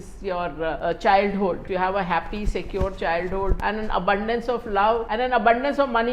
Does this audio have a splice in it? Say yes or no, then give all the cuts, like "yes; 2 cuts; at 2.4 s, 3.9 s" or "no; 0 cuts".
yes; 4 cuts; at 0.8 s, 1.6 s, 3.6 s, 5.1 s